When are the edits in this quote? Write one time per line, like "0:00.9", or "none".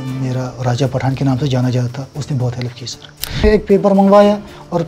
0:03.4